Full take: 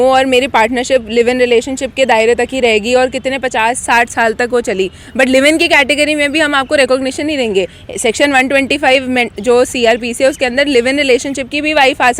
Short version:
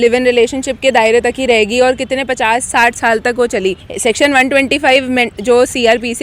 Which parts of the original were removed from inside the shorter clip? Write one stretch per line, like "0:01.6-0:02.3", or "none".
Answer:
0:05.0-0:07.9